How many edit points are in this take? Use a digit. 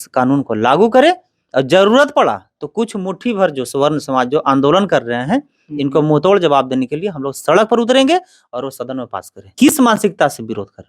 1